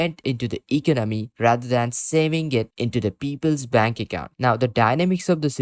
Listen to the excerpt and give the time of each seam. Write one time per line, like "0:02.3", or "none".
0:04.3